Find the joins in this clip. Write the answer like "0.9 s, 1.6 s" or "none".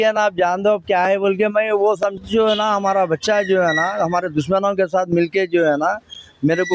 2.2 s